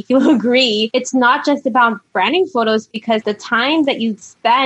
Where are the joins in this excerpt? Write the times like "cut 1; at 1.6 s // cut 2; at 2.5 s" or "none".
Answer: cut 1; at 0.9 s // cut 2; at 3.1 s